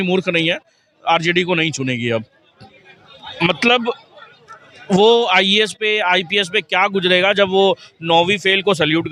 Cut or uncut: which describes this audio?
uncut